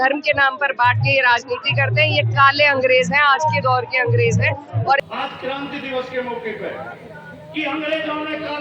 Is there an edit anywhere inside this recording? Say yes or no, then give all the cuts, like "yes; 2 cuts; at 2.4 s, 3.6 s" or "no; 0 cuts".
yes; 1 cut; at 5.0 s